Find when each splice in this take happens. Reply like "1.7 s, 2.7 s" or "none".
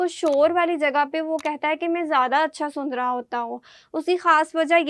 none